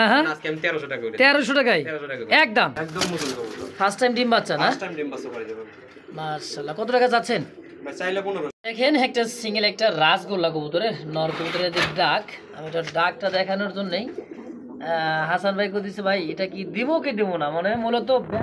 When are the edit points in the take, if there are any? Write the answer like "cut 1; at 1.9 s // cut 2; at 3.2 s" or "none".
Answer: cut 1; at 2.8 s // cut 2; at 8.5 s